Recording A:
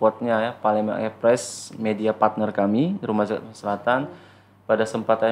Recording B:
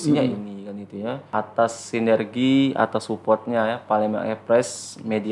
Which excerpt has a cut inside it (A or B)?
B